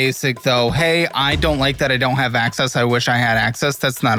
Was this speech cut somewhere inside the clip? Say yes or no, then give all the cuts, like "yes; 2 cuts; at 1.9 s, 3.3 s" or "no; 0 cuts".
no; 0 cuts